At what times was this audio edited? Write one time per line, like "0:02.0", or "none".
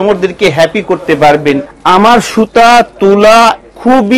0:01.7

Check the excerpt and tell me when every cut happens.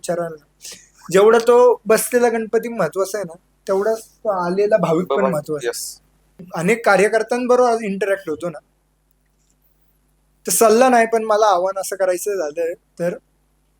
0:06.5

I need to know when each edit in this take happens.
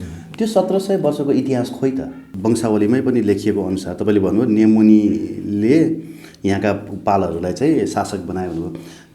0:02.2

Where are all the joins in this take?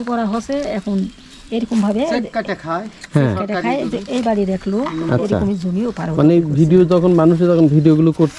none

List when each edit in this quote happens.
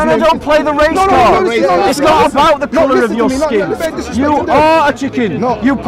0:03.9

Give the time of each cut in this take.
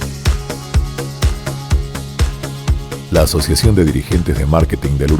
0:02.6

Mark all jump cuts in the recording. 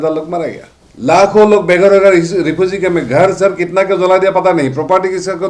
none

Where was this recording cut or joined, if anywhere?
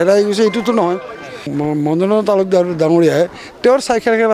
0:01.5

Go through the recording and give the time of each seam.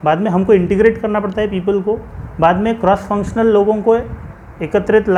none

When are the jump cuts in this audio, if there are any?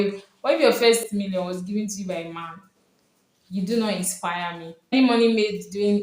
0:00.8
0:04.9

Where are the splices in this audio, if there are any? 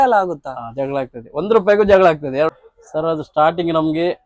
0:02.6

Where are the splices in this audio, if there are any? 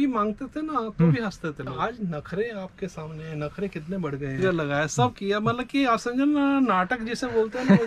0:01.8
0:04.4

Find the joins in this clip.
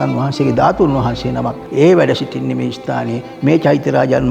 0:01.6

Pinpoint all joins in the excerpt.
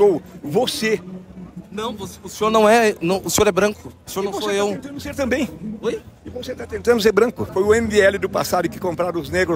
0:07.4

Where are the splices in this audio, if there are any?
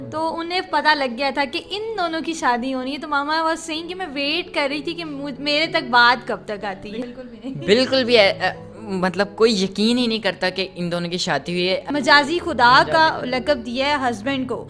0:07.0
0:11.8

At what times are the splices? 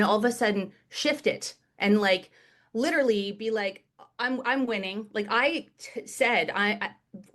none

